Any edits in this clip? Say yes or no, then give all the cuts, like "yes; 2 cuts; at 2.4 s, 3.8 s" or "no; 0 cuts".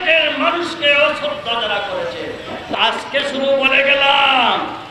yes; 1 cut; at 2.7 s